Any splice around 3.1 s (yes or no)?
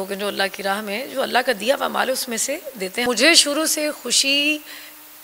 yes